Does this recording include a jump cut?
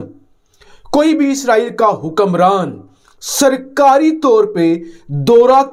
no; 0 cuts

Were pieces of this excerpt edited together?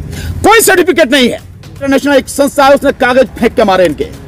yes; 1 cut; at 1.8 s

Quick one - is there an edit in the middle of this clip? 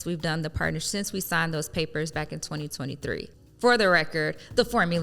yes; 1 cut; at 3.4 s

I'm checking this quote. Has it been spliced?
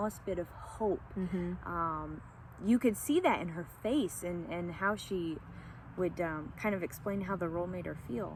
no; 0 cuts

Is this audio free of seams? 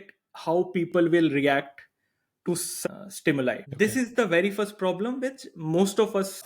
no; 2 cuts; at 2.8 s, 3.7 s

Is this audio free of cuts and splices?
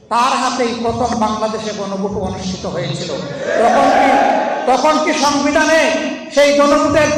yes; 0 cuts

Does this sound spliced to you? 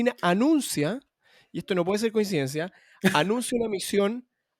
no; 0 cuts

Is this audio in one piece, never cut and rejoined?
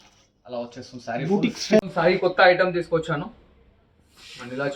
no; 1 cut; at 1.8 s

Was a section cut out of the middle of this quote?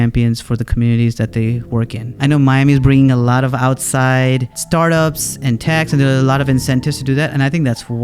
yes; 2 cuts; at 2.1 s, 4.5 s

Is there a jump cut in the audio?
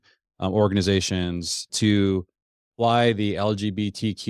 yes; 1 cut; at 1.7 s

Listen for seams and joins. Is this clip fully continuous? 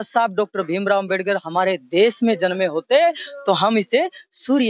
yes; 0 cuts

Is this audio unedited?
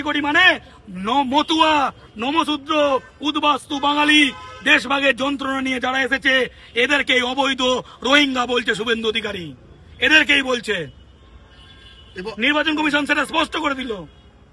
yes; 0 cuts

